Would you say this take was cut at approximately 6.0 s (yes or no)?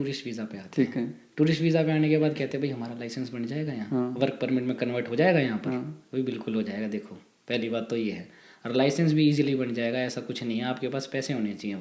no